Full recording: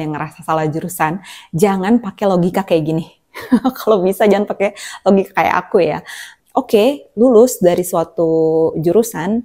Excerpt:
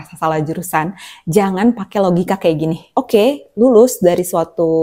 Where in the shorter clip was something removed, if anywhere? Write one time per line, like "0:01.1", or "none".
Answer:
0:02.8